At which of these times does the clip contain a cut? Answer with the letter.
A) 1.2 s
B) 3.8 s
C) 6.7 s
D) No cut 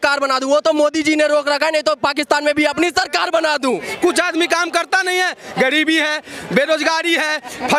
B